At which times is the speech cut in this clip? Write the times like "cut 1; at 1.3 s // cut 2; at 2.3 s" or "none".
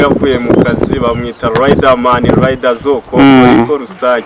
none

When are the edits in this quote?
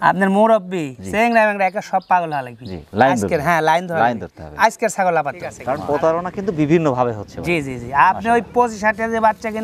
cut 1; at 5.5 s

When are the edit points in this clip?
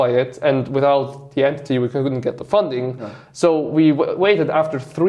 none

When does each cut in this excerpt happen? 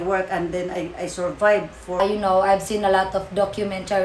cut 1; at 2.0 s

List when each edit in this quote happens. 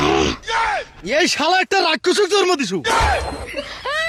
none

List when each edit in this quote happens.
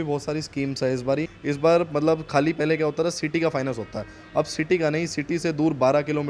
cut 1; at 1.3 s

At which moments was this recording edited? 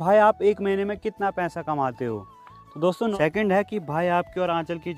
cut 1; at 3.1 s

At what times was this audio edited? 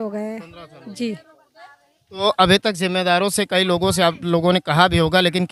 none

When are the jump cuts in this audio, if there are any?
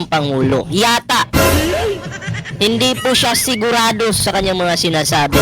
cut 1; at 4.2 s

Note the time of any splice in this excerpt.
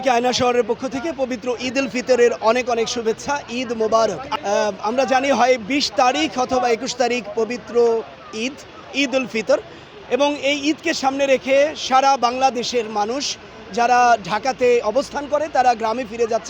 cut 1; at 4.3 s

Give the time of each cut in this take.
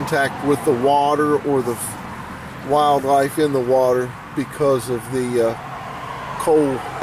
cut 1; at 5.2 s

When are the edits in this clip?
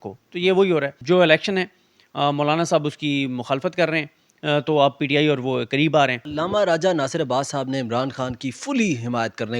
cut 1; at 1.0 s // cut 2; at 6.2 s

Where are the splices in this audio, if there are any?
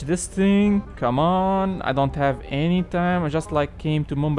none

